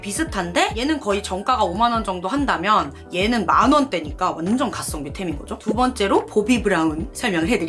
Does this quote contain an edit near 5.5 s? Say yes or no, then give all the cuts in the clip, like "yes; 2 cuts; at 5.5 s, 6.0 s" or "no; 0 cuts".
no; 0 cuts